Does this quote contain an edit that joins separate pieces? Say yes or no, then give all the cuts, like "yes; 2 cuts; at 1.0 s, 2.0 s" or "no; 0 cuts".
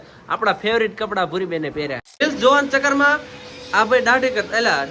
yes; 1 cut; at 2.2 s